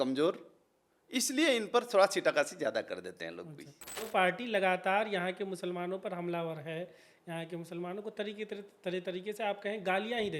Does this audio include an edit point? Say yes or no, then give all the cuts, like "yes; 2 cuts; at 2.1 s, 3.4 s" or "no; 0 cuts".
yes; 1 cut; at 4.1 s